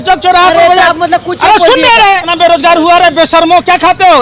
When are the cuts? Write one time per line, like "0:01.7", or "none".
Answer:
0:02.3